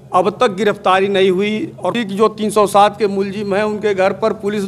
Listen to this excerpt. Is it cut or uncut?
cut